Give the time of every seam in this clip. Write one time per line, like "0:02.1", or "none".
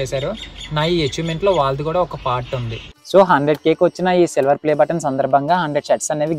0:02.9